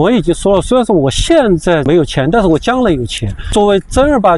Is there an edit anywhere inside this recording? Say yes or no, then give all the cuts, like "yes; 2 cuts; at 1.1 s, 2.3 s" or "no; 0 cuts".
yes; 2 cuts; at 1.8 s, 3.5 s